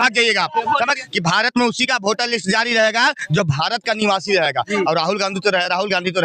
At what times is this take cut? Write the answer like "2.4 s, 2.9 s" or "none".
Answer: 1.0 s